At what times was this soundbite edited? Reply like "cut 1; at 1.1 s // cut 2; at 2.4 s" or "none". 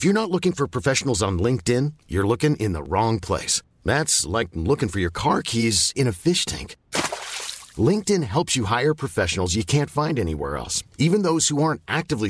none

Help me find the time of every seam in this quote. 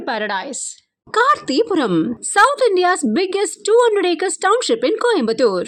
none

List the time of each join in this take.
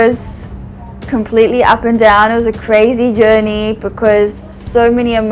none

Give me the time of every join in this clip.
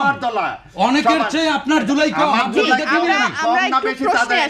none

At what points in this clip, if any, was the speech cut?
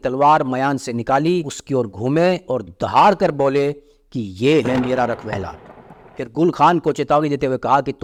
none

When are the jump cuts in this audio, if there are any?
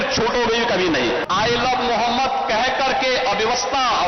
cut 1; at 1.2 s

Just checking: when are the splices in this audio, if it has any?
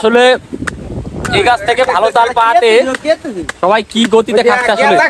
none

